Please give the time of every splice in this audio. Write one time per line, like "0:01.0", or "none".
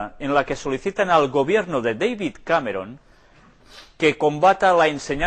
none